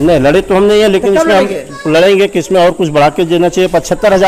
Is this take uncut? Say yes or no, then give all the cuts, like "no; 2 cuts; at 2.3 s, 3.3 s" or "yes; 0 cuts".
yes; 0 cuts